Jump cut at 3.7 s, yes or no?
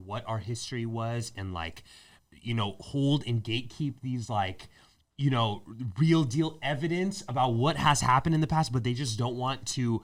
no